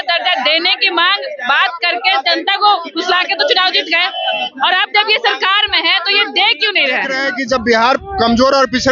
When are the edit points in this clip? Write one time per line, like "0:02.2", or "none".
0:07.2